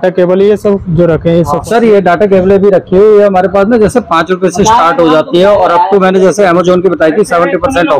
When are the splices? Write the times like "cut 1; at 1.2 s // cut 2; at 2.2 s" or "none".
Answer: cut 1; at 1.6 s